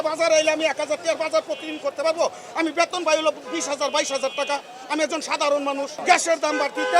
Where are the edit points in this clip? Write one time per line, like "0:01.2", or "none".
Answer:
0:05.9